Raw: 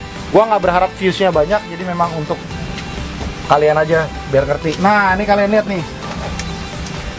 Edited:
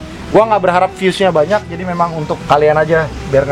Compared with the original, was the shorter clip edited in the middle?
yes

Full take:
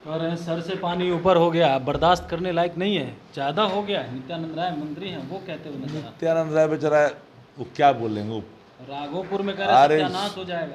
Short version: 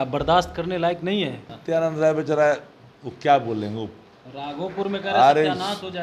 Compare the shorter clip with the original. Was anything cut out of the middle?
yes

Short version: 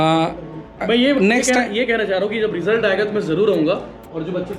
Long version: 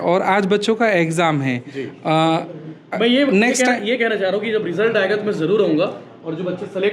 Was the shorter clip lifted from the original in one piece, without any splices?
yes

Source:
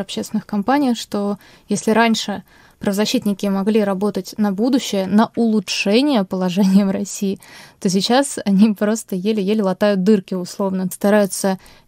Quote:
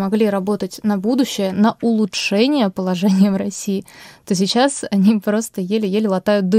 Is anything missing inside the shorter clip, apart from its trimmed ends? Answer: no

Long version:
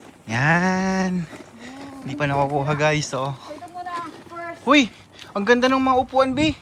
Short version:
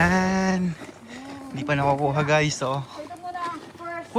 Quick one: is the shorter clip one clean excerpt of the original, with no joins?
yes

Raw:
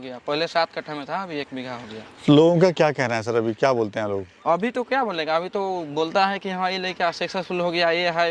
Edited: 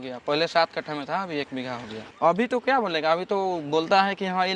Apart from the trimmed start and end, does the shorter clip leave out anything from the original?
yes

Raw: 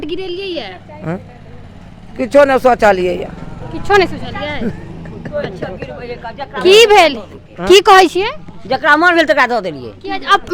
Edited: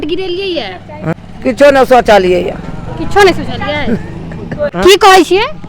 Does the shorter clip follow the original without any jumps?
no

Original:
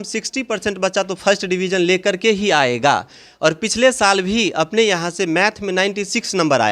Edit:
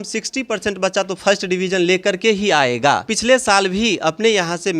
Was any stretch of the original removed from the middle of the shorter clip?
yes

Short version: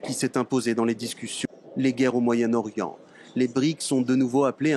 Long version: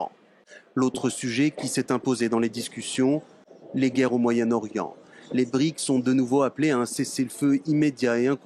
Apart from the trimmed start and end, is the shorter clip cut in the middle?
yes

